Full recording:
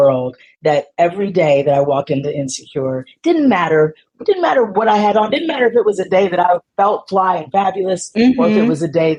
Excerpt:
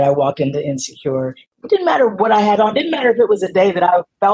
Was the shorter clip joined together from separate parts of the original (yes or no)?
yes